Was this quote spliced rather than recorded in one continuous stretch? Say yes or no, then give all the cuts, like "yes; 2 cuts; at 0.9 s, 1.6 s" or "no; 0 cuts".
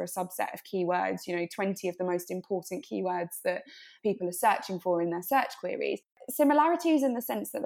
yes; 1 cut; at 6.1 s